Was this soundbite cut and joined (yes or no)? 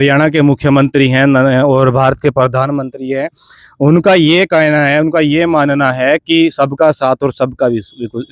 no